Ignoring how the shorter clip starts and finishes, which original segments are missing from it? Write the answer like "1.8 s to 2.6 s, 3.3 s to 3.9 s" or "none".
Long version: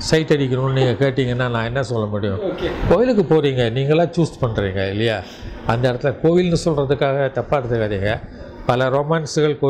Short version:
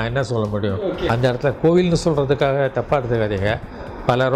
2.7 s to 5.7 s